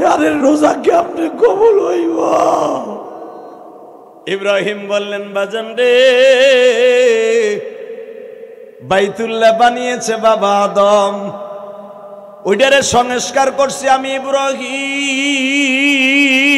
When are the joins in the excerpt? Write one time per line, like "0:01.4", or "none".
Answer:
0:04.1